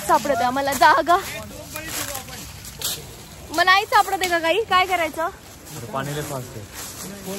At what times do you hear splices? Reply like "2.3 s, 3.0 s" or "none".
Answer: none